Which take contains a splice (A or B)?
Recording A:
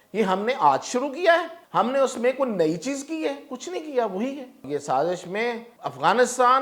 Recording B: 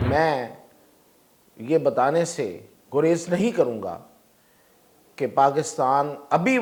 A